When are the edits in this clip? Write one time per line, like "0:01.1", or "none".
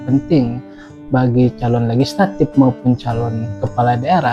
none